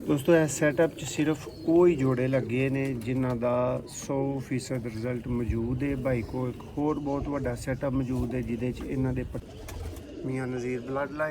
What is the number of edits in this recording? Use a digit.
1